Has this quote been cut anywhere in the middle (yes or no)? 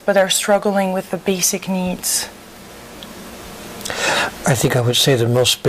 yes